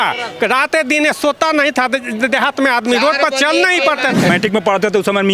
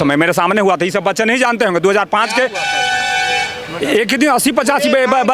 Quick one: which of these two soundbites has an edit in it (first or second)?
first